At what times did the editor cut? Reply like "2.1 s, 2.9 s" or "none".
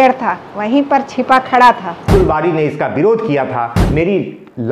2.1 s, 3.8 s